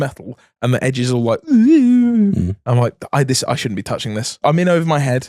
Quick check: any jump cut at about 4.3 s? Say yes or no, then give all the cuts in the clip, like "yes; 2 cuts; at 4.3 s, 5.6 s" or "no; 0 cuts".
yes; 1 cut; at 4.3 s